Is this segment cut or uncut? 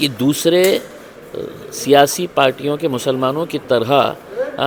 uncut